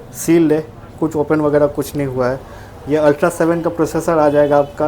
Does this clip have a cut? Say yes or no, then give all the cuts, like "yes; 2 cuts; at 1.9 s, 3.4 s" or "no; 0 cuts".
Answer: no; 0 cuts